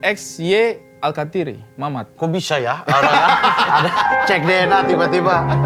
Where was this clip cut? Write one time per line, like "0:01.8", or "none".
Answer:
none